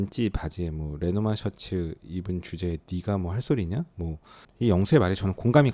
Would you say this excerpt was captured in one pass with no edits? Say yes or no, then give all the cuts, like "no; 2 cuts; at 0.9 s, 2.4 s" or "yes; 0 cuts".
no; 1 cut; at 4.4 s